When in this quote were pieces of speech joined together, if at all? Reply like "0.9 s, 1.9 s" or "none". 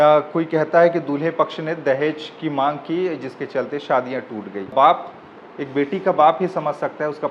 4.7 s